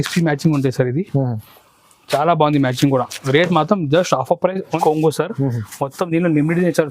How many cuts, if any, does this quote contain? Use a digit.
1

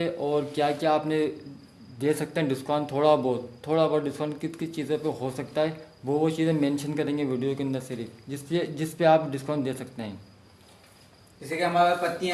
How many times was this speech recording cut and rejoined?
0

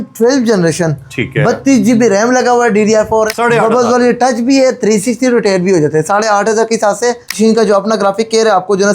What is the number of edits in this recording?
2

